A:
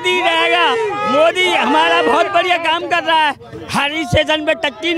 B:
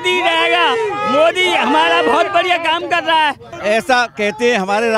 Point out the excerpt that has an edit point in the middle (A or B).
B